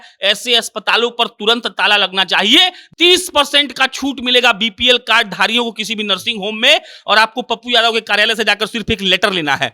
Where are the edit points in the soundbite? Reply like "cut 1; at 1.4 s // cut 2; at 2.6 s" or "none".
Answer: cut 1; at 2.8 s